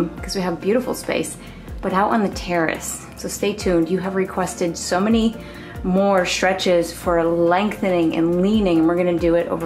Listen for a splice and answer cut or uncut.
uncut